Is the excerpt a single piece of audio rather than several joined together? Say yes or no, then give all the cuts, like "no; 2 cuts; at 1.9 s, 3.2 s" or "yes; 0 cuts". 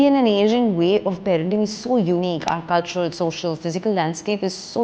yes; 0 cuts